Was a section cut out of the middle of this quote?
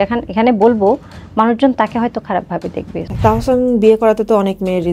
yes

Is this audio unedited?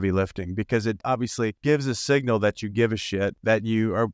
no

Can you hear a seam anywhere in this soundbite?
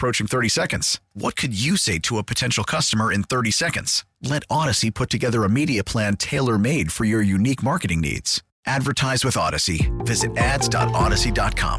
no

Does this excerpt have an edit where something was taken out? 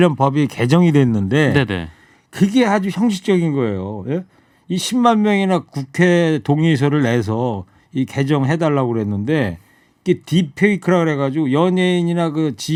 no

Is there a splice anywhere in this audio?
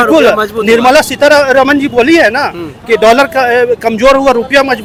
no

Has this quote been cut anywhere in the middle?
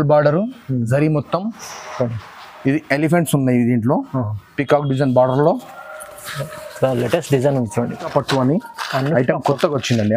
yes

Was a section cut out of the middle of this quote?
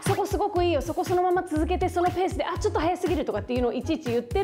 no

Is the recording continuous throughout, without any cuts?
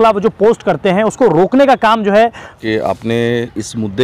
no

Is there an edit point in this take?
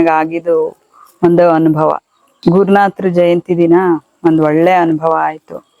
no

